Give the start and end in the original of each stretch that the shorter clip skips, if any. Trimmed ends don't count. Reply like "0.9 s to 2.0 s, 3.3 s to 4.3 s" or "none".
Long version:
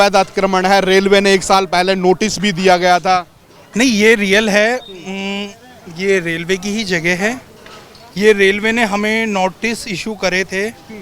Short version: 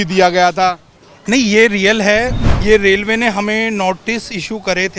4.9 s to 8.0 s